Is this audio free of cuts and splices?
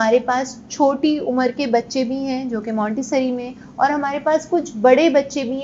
yes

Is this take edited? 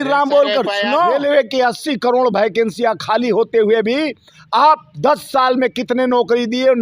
yes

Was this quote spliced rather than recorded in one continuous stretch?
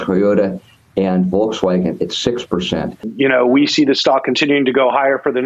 yes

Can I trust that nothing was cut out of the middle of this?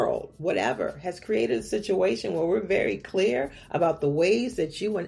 yes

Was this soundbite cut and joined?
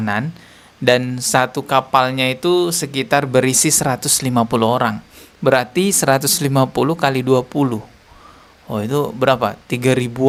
no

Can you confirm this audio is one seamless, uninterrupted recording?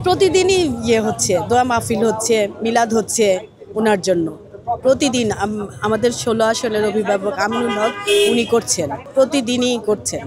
yes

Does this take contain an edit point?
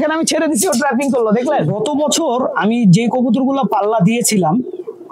yes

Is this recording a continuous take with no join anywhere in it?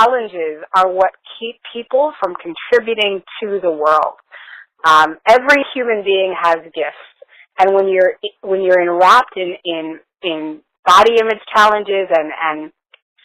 yes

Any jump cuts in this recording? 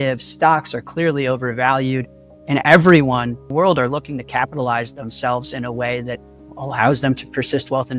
yes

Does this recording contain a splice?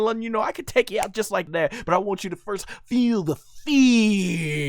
yes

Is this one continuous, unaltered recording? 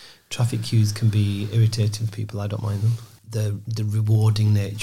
no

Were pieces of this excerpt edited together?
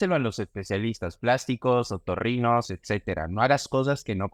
no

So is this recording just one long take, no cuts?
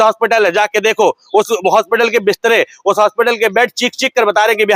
yes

